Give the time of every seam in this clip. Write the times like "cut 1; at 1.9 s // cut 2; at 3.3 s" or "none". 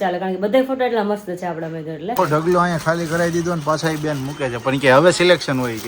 cut 1; at 2.1 s